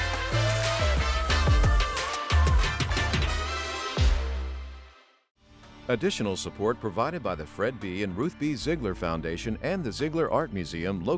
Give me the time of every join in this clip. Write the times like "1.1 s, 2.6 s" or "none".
5.7 s